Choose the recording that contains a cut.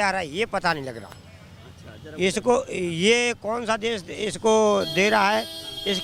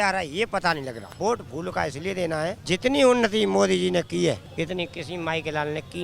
second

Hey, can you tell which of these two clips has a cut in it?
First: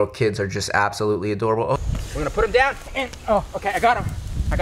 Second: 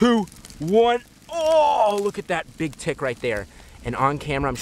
first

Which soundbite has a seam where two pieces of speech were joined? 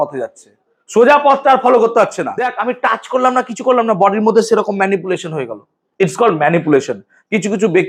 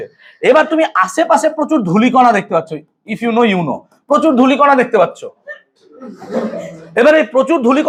first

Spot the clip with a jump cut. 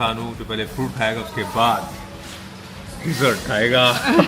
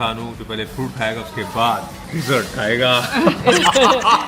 second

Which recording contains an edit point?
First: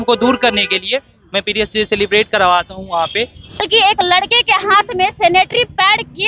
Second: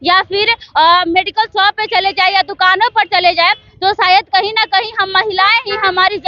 first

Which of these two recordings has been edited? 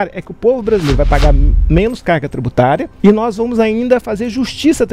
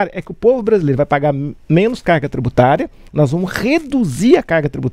first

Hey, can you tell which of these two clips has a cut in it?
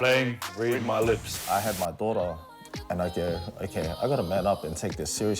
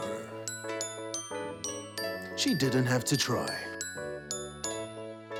first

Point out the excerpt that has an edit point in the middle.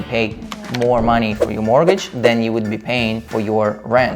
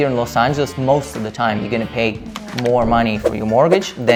first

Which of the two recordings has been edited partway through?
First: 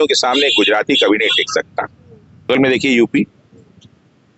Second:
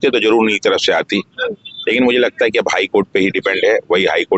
first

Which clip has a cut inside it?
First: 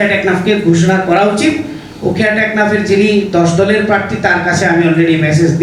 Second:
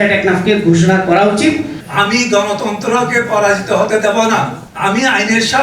second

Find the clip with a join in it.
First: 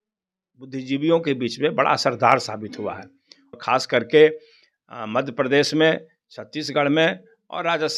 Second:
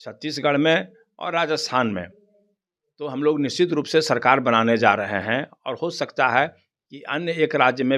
first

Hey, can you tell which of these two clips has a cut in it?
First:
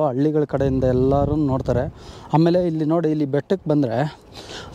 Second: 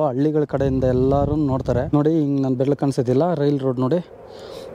second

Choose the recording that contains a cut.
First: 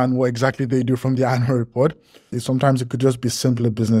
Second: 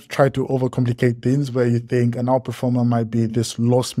first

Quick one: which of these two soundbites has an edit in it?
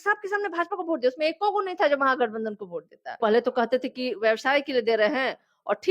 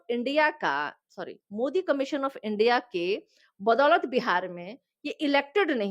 first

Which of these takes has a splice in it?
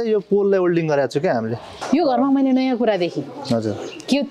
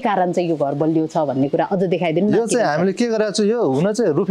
first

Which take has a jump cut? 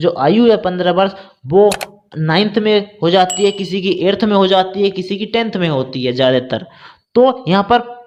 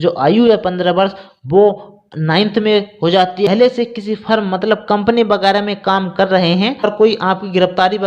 second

